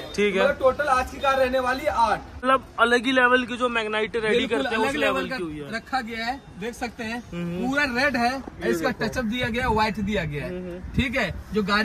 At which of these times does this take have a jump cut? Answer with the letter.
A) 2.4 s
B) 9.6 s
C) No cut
A